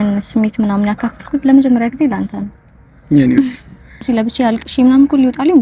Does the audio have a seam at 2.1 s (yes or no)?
no